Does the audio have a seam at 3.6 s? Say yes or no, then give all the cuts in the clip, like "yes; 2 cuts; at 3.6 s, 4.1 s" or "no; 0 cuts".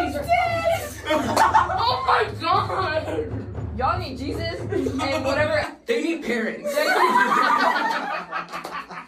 yes; 1 cut; at 3.6 s